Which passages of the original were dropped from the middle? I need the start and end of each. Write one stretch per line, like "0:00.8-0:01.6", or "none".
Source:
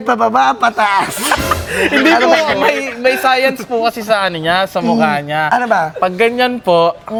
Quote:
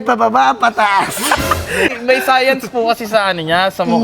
0:01.9-0:02.9